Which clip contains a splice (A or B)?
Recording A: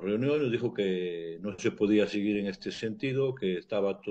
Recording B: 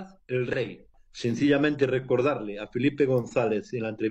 B